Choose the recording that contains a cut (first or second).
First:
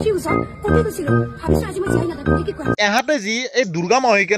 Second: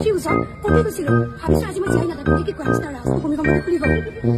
first